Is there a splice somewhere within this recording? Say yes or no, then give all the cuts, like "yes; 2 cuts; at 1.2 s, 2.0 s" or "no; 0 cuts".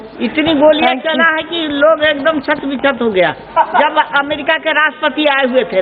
no; 0 cuts